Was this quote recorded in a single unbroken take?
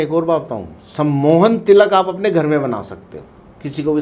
yes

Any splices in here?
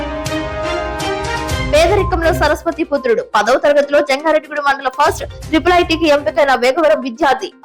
yes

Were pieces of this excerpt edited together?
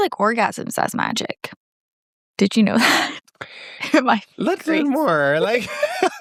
no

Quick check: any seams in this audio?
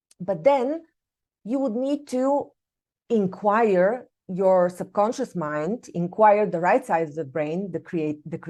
no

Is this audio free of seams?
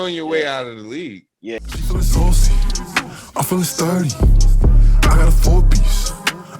no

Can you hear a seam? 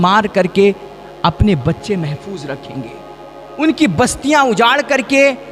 no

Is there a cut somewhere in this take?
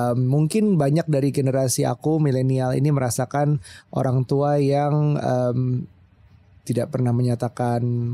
no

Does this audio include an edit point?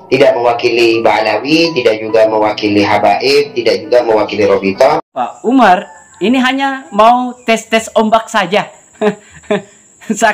yes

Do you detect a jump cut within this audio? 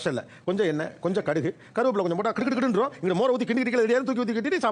no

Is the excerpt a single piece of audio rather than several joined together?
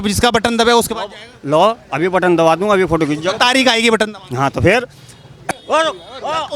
no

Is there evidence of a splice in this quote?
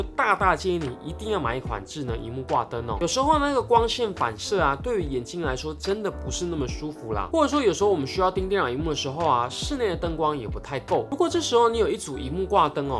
yes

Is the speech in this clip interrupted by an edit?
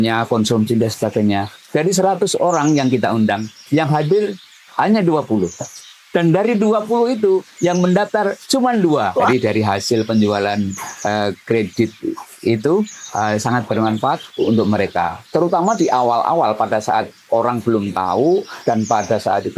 yes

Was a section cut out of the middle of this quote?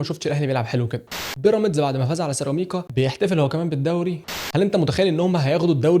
yes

